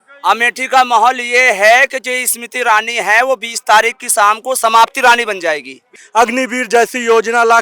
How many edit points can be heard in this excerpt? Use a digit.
1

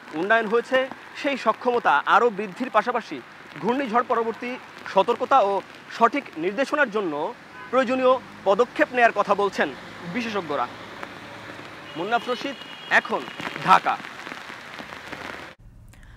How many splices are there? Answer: 0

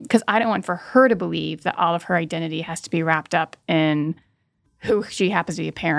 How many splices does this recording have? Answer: 0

